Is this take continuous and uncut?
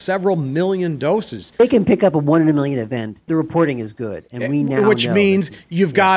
no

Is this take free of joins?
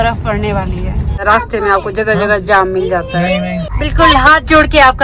no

